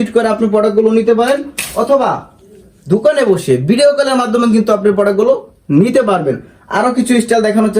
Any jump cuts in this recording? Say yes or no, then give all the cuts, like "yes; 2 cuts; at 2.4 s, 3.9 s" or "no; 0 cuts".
no; 0 cuts